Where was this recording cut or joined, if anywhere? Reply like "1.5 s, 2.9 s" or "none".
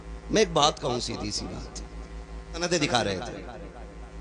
2.6 s